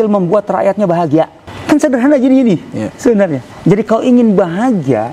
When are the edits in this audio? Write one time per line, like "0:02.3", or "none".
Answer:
0:01.5
0:03.8